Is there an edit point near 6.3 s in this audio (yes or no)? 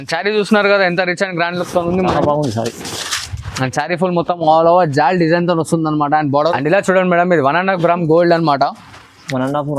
yes